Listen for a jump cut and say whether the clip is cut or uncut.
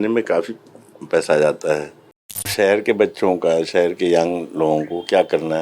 cut